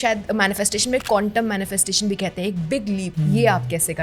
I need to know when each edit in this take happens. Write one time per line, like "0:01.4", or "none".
0:03.1